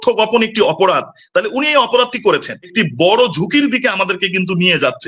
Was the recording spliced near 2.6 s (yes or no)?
yes